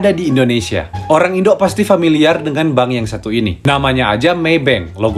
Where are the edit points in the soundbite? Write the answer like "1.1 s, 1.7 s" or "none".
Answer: none

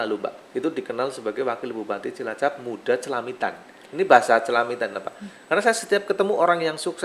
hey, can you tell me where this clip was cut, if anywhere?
none

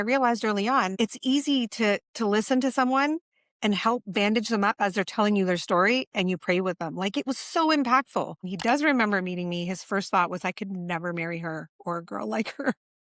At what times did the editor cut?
0.9 s, 8.5 s

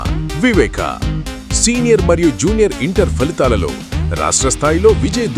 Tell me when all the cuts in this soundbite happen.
none

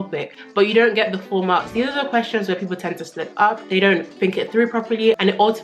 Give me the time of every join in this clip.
1.7 s, 3.6 s

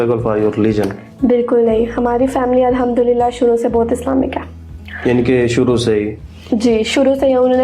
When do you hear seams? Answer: none

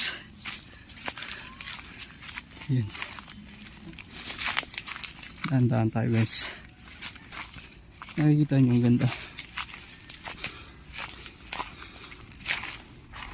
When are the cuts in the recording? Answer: 7.3 s, 12.2 s

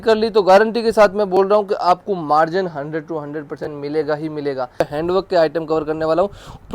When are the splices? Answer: 4.8 s

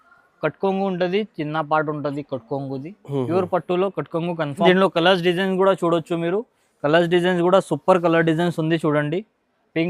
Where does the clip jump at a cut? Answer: 4.7 s

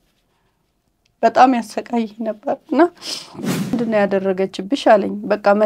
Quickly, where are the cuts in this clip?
3.8 s

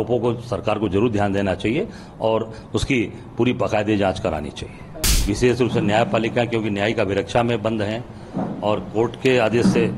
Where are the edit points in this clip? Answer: 4.9 s

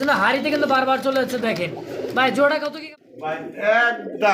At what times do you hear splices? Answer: 2.9 s

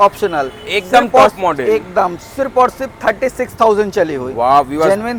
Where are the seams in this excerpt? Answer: none

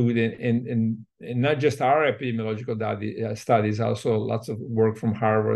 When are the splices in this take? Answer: none

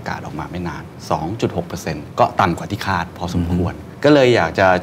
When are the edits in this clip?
0.9 s, 2.0 s, 3.8 s

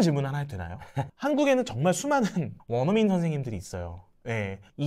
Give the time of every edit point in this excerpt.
1.0 s

